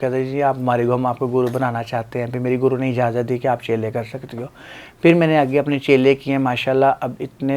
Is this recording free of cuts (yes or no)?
yes